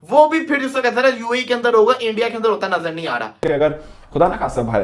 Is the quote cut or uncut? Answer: cut